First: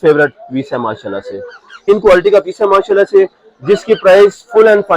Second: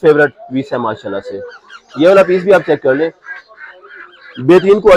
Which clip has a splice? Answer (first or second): first